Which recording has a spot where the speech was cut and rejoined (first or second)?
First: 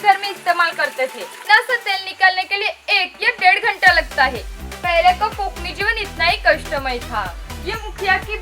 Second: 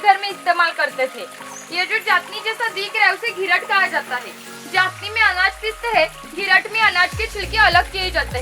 first